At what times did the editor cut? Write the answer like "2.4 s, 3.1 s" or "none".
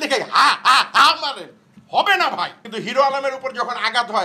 2.6 s